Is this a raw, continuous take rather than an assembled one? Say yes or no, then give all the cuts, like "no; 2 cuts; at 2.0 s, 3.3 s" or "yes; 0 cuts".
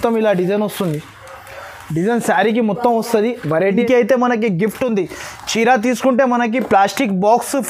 no; 1 cut; at 3.8 s